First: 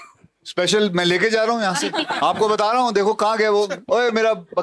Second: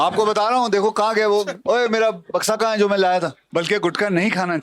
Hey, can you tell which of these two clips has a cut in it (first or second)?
second